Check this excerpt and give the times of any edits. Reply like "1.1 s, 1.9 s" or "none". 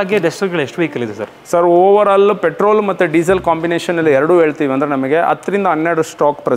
none